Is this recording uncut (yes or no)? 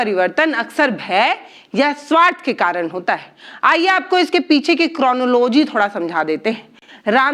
yes